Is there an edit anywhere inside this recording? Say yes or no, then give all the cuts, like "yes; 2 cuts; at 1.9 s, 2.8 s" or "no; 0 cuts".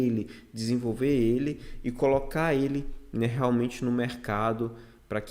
no; 0 cuts